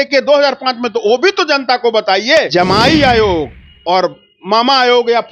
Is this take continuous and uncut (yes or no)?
no